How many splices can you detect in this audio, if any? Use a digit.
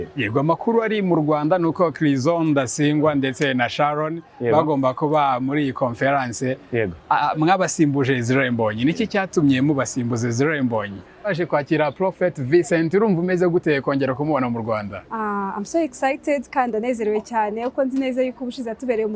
1